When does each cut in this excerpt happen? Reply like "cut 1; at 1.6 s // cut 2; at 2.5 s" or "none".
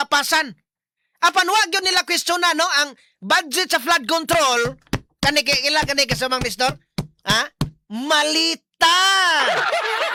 none